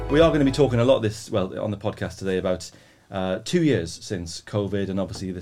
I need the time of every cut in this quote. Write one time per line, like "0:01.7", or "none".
none